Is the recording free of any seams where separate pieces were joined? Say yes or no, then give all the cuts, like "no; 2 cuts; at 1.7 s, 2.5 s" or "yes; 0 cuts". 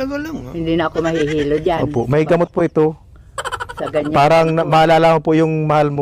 yes; 0 cuts